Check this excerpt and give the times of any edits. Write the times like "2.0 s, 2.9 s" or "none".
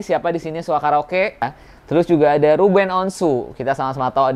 1.6 s